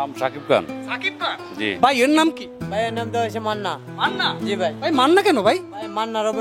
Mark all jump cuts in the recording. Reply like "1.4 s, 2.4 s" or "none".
1.7 s